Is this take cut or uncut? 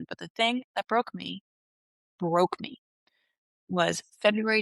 uncut